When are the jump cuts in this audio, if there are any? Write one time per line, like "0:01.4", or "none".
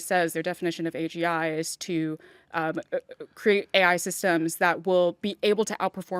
none